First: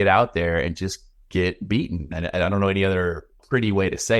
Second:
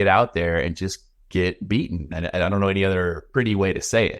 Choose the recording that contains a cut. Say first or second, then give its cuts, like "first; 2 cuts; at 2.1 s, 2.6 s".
second; 1 cut; at 3.2 s